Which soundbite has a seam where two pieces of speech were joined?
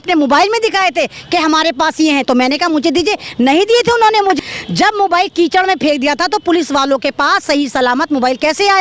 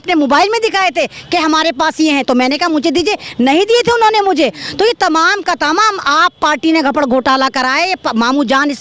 first; 1 cut; at 4.4 s

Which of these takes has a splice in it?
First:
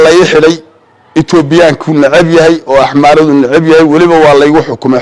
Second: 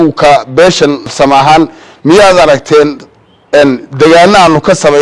second; 1 cut; at 1.1 s

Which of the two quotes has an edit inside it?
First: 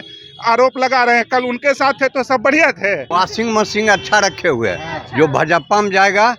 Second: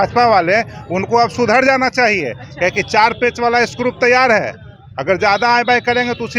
first; 1 cut; at 3.1 s

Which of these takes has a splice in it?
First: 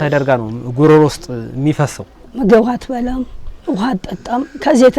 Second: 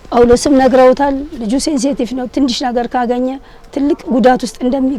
first; 1 cut; at 2.2 s

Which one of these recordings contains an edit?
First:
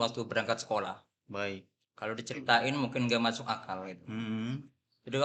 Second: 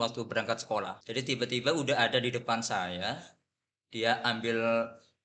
second; 1 cut; at 1.0 s

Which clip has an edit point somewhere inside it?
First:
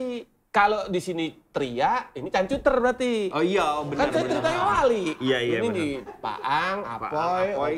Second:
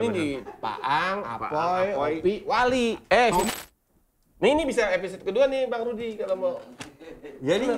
second; 1 cut; at 3.5 s

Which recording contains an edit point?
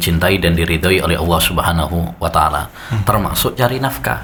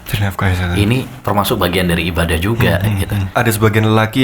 second; 2 cuts; at 1.1 s, 3.3 s

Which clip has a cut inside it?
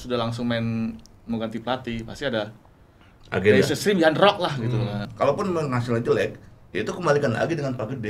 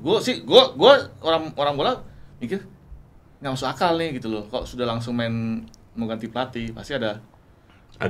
first; 1 cut; at 5.1 s

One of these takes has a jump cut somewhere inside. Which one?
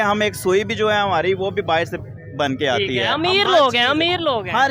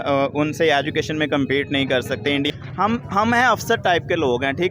second; 1 cut; at 2.5 s

